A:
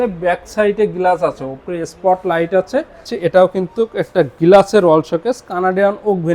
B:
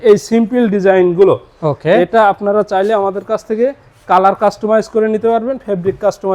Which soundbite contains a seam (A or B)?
A